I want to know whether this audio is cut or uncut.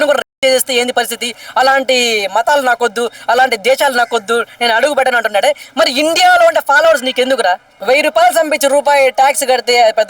cut